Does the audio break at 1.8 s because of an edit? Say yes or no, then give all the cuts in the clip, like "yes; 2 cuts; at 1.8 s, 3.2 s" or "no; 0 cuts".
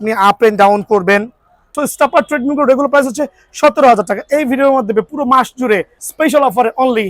yes; 2 cuts; at 1.8 s, 6.0 s